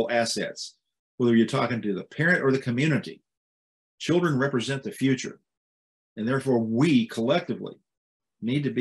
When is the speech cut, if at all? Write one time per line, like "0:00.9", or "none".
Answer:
none

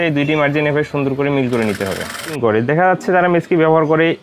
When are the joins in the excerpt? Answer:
0:02.4

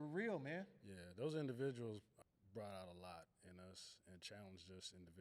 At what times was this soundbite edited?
0:02.1

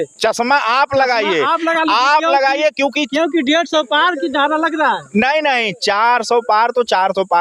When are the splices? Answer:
none

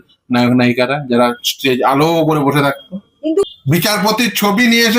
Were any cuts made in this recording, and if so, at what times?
0:03.4

